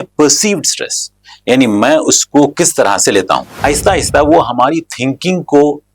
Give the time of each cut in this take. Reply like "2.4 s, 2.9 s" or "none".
3.6 s